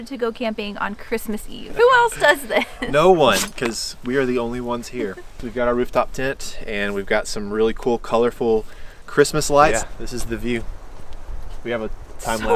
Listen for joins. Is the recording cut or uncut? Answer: cut